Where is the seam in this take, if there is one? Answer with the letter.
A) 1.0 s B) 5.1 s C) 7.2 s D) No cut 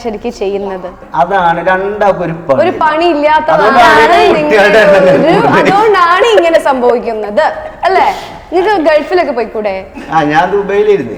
A